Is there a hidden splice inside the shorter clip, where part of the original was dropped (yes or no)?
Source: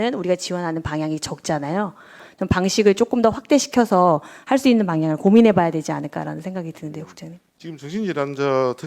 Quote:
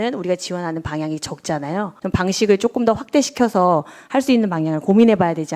yes